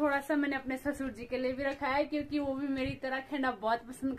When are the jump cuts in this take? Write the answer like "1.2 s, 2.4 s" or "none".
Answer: none